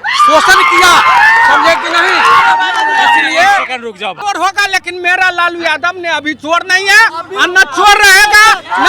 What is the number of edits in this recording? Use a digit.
1